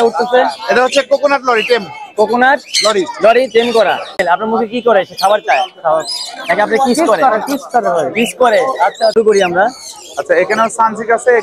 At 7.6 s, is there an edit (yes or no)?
no